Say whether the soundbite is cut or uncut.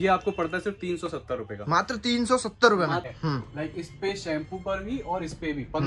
cut